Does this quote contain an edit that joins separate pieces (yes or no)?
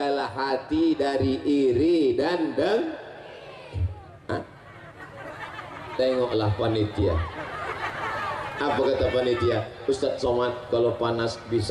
no